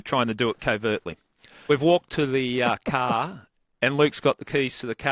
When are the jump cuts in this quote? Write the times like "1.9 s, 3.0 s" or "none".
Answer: 1.7 s